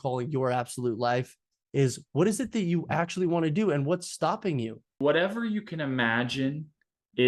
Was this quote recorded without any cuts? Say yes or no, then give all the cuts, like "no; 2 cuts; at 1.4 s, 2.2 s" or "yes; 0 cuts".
no; 1 cut; at 4.9 s